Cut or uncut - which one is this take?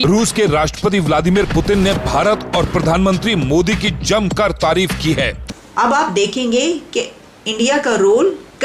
cut